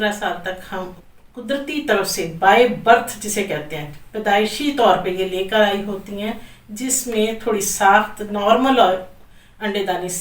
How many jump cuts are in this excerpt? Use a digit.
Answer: 1